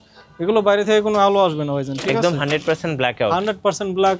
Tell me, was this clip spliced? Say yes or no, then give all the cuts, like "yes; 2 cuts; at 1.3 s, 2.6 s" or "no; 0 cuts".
no; 0 cuts